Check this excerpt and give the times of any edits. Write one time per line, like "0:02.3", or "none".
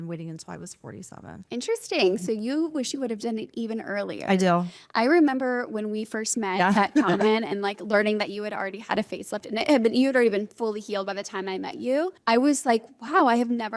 0:12.2